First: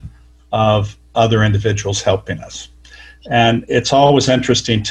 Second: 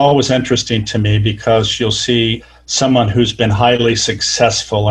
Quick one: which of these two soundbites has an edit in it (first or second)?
second